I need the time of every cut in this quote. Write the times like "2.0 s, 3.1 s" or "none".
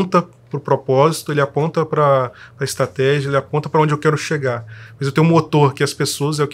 none